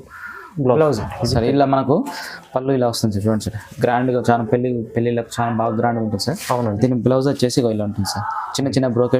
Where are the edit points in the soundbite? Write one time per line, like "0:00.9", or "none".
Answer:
0:01.1